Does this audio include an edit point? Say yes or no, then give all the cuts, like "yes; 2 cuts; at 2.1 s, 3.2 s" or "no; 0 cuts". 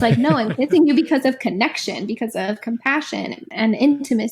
yes; 1 cut; at 3.4 s